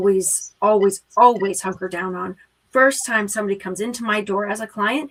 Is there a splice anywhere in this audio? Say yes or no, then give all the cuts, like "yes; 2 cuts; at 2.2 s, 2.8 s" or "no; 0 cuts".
no; 0 cuts